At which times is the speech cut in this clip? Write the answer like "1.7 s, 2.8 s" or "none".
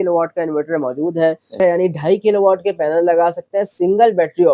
1.6 s